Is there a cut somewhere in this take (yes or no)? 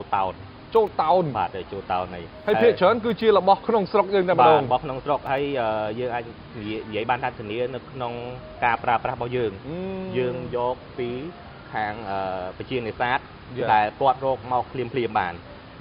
no